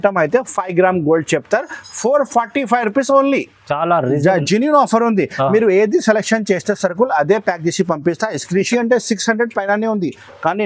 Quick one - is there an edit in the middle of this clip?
yes; 1 cut; at 8.7 s

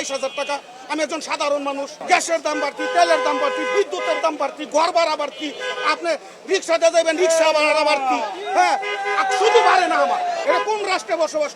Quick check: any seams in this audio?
yes; 2 cuts; at 1.9 s, 10.4 s

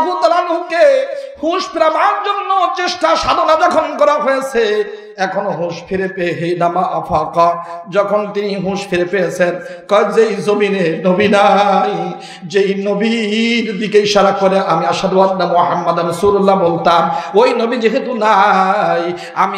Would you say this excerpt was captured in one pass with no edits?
yes; 0 cuts

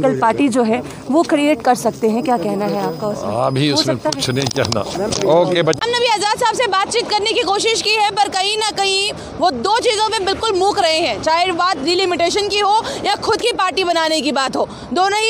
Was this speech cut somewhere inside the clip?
no; 0 cuts

